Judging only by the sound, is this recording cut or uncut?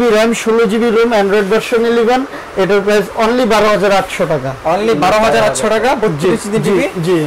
uncut